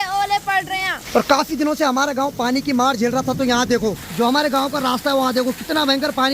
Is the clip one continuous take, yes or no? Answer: no